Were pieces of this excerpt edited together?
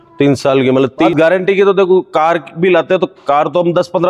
yes; 1 cut; at 1.1 s

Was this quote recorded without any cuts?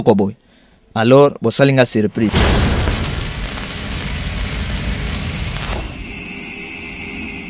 no; 1 cut; at 2.3 s

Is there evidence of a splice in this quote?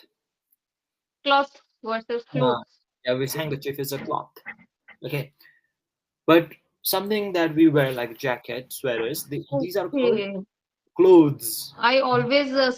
yes; 2 cuts; at 3.3 s, 11.7 s

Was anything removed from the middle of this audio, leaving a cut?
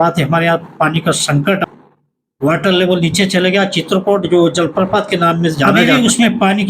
yes; 2 cuts; at 1.6 s, 5.7 s

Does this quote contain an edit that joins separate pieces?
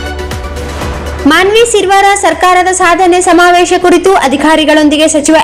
yes; 1 cut; at 0.9 s

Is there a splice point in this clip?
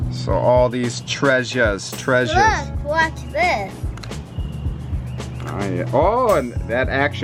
no; 0 cuts

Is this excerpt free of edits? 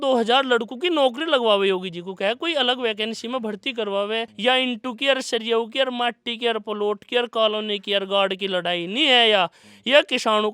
no; 1 cut; at 4.3 s

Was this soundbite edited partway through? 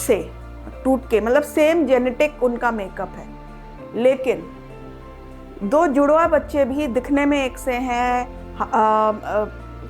no; 0 cuts

